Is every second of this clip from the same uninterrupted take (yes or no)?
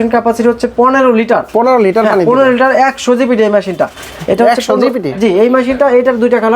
yes